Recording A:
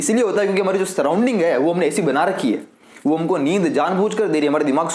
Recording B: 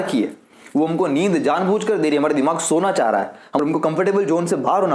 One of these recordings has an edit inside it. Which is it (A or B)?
B